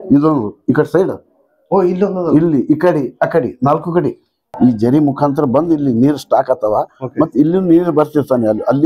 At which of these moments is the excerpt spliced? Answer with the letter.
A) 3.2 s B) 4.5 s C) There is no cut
B